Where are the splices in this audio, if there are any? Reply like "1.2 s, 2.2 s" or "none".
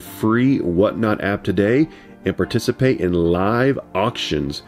none